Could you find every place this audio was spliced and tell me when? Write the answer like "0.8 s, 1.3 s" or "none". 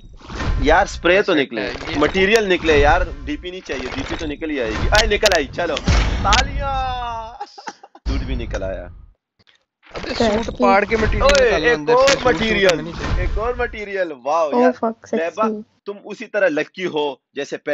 8.1 s